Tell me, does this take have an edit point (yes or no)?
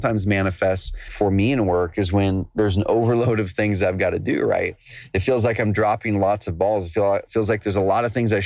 yes